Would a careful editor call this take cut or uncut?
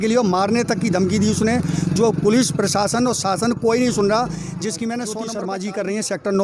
cut